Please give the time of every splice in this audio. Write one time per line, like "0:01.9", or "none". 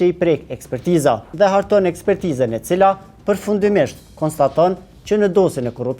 0:01.3